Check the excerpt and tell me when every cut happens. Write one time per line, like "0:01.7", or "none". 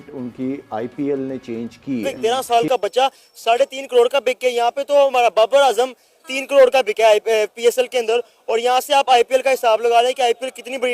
0:02.1